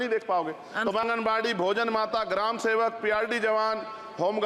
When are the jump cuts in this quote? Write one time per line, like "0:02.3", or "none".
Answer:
0:01.0